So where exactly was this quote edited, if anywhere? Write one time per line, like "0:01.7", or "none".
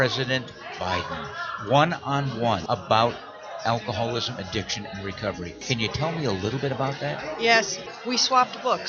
0:02.6
0:05.6
0:07.8